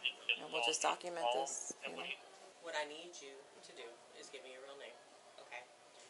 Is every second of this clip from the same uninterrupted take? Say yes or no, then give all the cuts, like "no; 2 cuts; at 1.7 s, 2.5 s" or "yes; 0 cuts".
no; 1 cut; at 2.5 s